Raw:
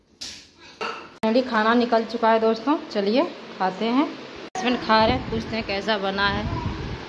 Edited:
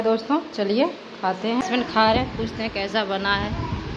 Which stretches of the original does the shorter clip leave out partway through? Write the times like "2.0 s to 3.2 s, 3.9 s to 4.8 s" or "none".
4.0 s to 4.5 s